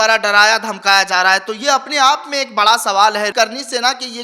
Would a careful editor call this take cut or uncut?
cut